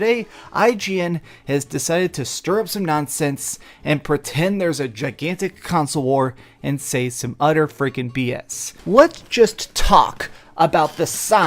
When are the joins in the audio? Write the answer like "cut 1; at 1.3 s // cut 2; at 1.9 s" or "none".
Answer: cut 1; at 8.7 s

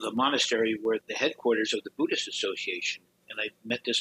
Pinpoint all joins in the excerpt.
cut 1; at 1.1 s // cut 2; at 3.2 s

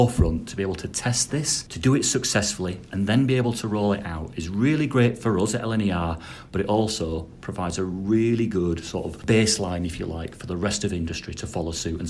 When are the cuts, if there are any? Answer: cut 1; at 1.6 s // cut 2; at 9.1 s

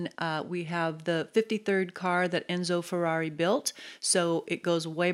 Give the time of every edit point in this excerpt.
none

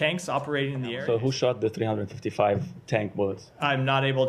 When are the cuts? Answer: cut 1; at 0.9 s

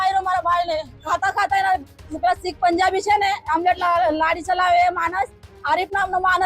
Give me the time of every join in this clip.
cut 1; at 1.0 s

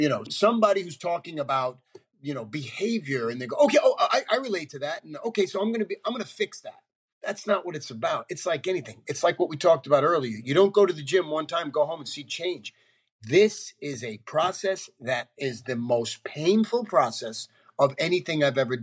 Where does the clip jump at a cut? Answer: none

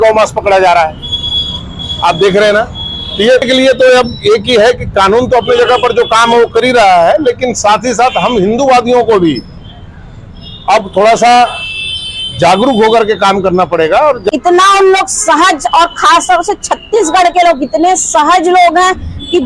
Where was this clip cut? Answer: cut 1; at 3.5 s // cut 2; at 14.2 s

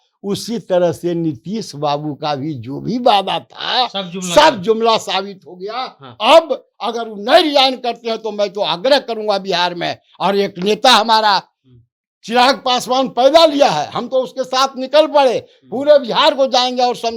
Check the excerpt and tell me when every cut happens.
none

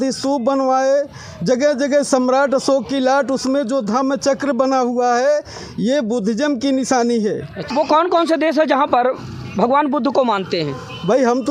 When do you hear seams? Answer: cut 1; at 7.7 s

